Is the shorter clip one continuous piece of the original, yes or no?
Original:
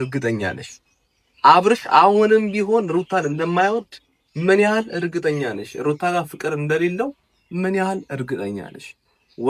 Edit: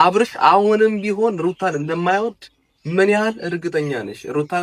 yes